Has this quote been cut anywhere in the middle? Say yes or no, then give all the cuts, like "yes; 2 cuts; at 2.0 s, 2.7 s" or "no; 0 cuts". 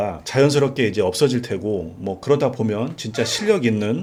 no; 0 cuts